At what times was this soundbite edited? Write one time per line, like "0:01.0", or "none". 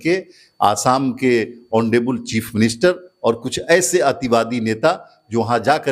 none